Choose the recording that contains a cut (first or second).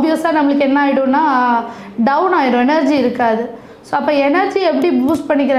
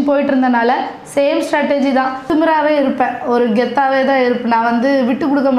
second